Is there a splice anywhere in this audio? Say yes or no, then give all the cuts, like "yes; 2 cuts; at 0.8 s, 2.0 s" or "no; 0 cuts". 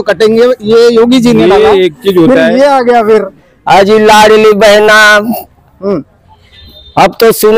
yes; 1 cut; at 3.4 s